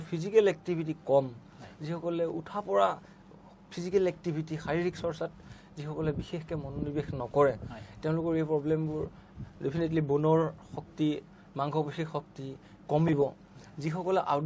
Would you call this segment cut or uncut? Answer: uncut